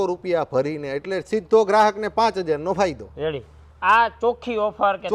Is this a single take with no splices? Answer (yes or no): yes